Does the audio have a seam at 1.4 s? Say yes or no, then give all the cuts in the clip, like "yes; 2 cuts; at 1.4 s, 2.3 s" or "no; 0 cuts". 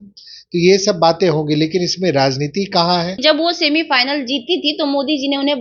no; 1 cut; at 3.2 s